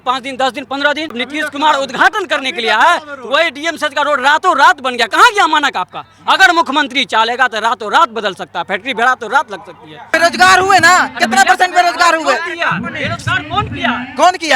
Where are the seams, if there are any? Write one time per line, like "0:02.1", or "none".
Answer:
0:01.1
0:10.0